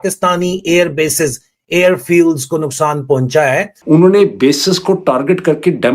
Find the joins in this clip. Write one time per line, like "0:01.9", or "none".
0:03.7